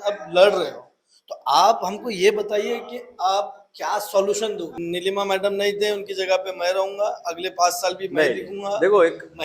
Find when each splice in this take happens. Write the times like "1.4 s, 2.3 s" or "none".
4.7 s